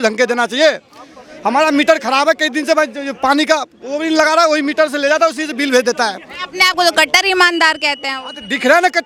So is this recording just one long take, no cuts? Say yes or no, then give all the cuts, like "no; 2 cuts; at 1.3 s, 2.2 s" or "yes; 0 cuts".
yes; 0 cuts